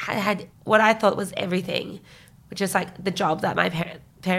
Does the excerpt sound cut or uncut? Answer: uncut